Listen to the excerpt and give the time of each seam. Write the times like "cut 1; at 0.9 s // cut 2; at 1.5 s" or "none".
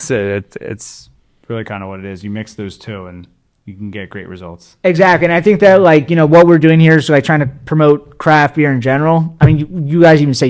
cut 1; at 9.3 s